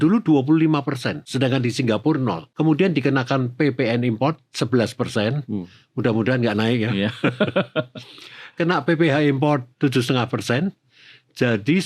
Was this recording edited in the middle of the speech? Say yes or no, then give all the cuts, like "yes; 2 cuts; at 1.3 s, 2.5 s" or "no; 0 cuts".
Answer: yes; 2 cuts; at 1.3 s, 2.5 s